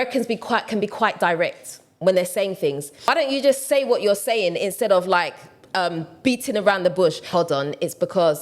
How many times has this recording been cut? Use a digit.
2